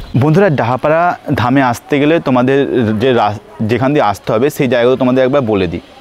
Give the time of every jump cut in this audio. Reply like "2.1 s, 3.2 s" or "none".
none